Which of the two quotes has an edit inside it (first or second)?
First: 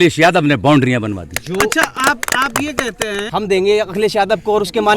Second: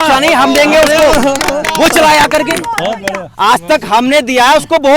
first